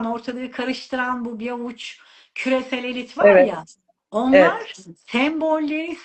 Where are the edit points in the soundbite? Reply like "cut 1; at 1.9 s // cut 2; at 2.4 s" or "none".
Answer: none